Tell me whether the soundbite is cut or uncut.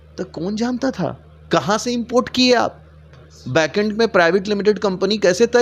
cut